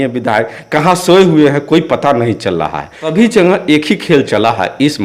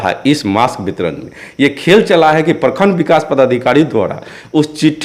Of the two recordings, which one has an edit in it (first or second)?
first